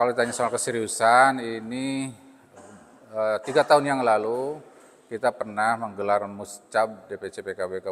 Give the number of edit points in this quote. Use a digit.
0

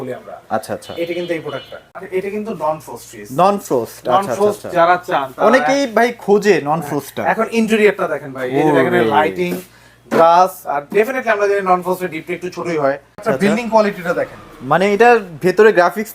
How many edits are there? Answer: 2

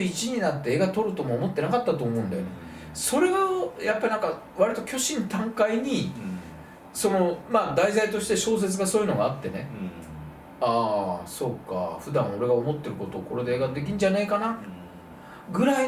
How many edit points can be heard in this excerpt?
0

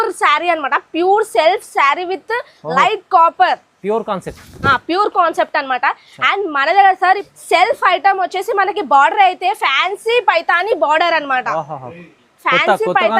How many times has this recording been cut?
1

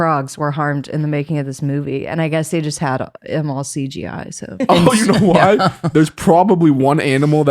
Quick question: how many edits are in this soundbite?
2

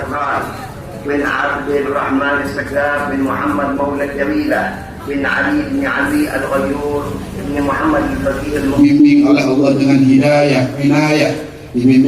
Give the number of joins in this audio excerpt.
1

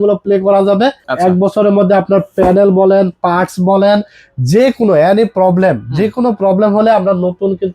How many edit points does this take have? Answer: 1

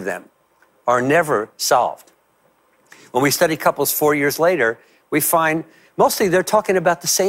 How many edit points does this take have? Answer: 0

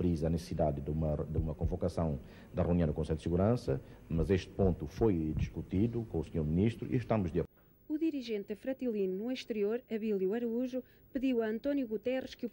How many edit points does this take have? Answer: 1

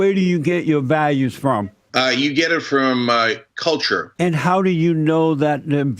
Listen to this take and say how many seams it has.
2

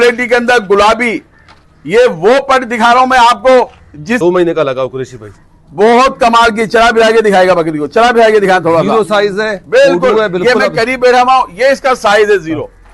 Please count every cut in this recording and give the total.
1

